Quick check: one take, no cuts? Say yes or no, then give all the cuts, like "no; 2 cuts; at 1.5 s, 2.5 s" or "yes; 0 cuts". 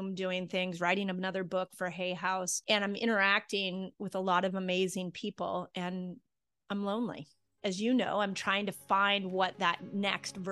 yes; 0 cuts